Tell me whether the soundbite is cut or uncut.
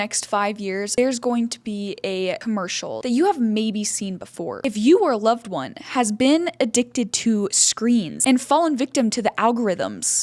cut